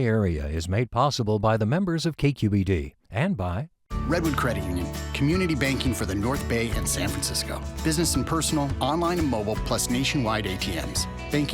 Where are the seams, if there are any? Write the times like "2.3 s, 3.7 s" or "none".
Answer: 3.8 s